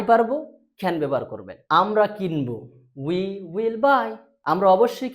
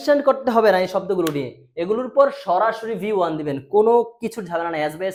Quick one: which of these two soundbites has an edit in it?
first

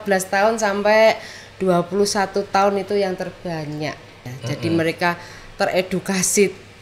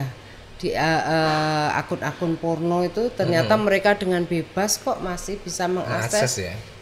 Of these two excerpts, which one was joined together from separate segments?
first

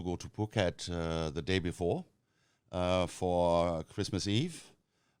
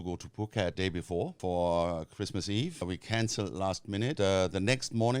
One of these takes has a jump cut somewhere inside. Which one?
second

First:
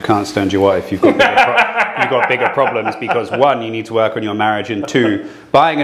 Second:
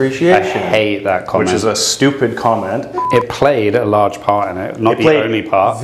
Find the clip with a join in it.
second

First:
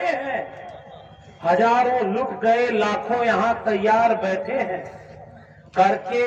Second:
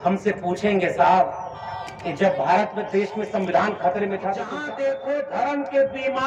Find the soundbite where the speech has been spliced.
second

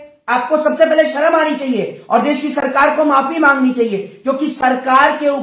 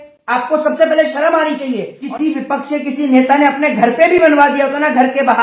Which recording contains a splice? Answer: second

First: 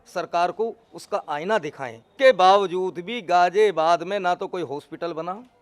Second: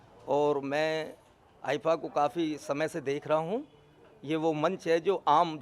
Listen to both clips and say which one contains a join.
first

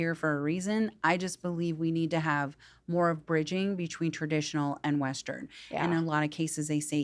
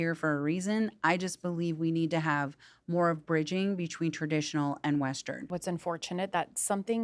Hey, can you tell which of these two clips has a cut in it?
second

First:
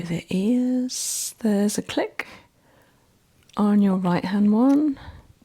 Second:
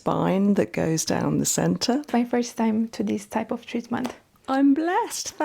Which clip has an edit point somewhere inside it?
second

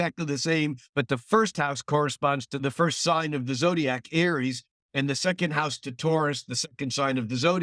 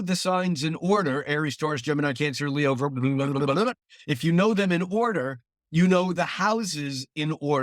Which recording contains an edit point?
first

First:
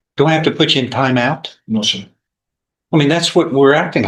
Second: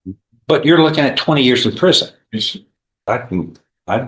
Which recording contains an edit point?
second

